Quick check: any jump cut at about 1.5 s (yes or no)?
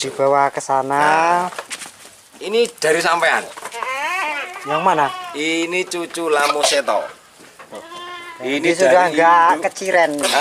yes